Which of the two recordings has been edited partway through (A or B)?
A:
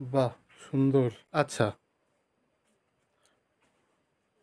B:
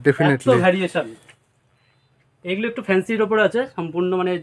A